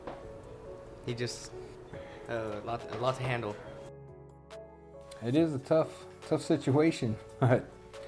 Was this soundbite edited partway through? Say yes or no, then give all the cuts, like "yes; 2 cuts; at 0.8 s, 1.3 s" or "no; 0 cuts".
yes; 3 cuts; at 1.7 s, 3.7 s, 5.2 s